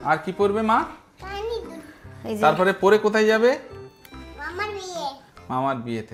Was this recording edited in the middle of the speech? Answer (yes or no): no